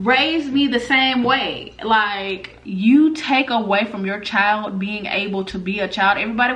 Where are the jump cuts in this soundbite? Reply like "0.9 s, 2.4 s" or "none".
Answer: 2.6 s